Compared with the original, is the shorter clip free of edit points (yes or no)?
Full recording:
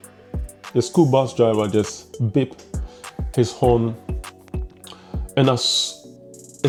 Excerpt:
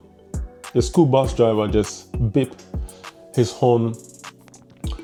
yes